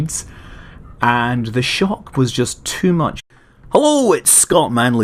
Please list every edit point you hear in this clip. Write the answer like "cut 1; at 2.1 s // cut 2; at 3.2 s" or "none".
none

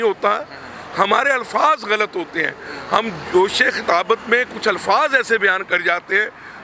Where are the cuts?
none

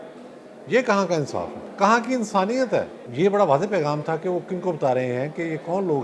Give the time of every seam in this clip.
cut 1; at 1.6 s // cut 2; at 3.0 s

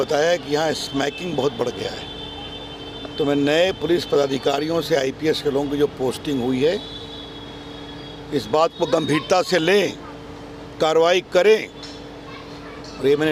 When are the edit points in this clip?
none

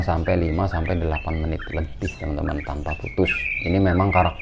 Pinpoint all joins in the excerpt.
cut 1; at 3.5 s

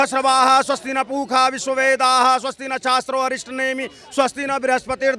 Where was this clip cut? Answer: none

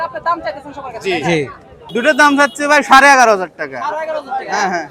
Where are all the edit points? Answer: cut 1; at 1.7 s

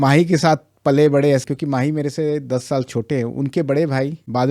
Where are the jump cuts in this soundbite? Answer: none

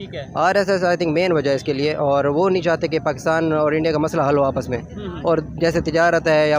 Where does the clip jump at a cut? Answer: none

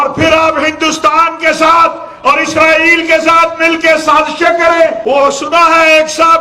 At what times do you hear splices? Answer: cut 1; at 5.0 s

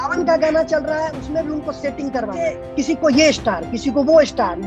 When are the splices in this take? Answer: cut 1; at 2.6 s

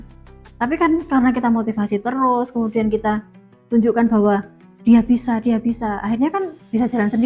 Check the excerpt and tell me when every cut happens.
none

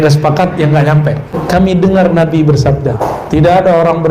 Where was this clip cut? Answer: cut 1; at 1.3 s // cut 2; at 3.0 s

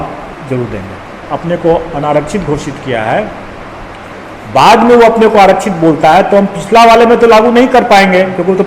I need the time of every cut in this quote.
cut 1; at 1.2 s

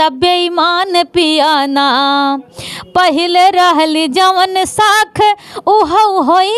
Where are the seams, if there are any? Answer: none

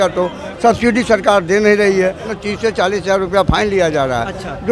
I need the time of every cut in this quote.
cut 1; at 2.3 s

